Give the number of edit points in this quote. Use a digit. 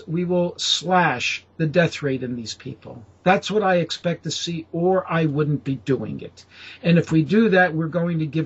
0